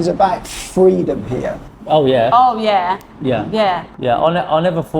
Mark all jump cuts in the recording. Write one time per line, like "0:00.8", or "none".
0:03.9